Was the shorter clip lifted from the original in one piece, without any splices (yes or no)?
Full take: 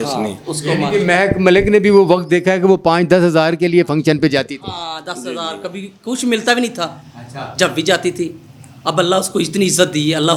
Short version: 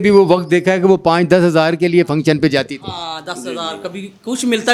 yes